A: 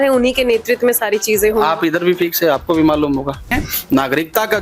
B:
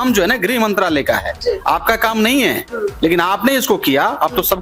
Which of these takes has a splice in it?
A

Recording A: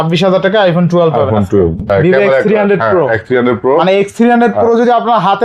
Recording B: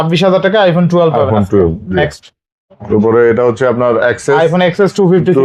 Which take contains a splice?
A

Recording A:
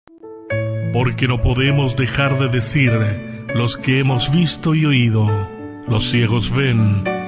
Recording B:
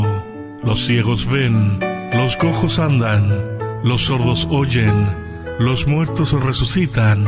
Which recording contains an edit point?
A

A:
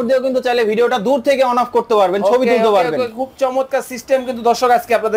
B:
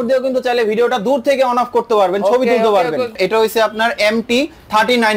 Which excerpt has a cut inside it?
B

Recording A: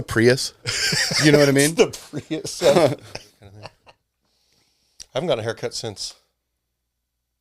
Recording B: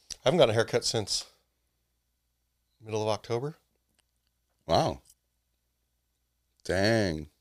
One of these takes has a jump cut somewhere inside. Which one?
A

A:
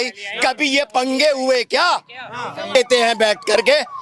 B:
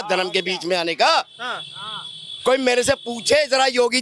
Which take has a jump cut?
A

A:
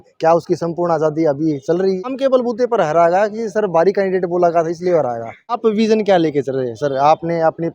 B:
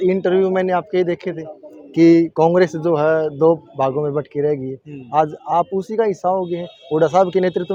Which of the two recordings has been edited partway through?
A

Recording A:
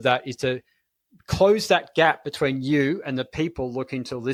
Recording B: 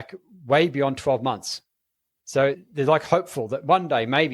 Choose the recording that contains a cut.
B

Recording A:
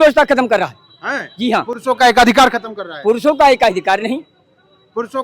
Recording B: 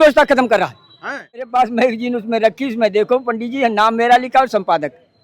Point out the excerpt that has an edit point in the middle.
B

